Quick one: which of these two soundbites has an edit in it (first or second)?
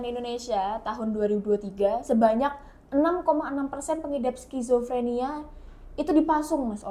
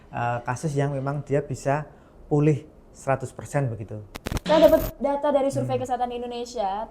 second